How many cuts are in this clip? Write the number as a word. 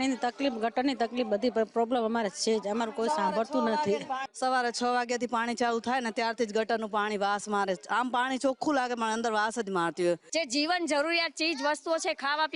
two